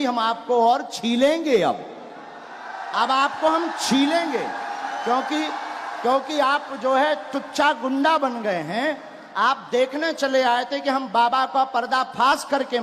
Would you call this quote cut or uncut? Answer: uncut